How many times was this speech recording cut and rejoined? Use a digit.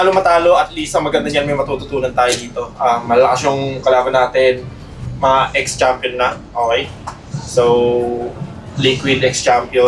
0